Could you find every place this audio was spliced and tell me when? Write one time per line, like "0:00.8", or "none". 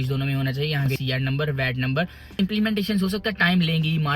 0:01.0
0:02.4